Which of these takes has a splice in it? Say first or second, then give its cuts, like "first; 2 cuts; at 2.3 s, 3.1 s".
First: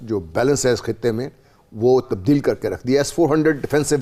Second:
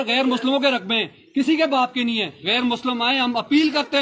second; 1 cut; at 2.4 s